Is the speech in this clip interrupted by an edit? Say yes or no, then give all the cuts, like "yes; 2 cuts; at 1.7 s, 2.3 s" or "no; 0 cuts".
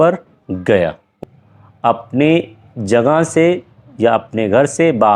yes; 1 cut; at 1.2 s